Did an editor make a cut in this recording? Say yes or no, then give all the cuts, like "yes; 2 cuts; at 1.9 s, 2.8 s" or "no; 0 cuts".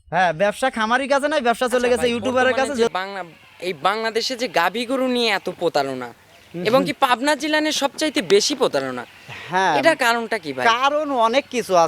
yes; 1 cut; at 2.9 s